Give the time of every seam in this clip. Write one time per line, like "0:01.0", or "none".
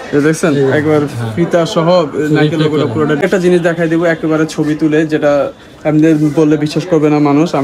0:03.2